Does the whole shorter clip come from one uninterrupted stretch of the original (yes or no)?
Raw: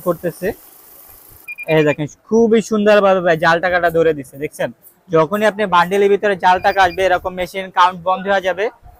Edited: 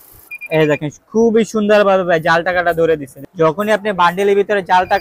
no